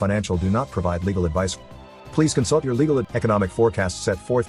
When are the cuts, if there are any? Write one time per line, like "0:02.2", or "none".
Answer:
0:03.1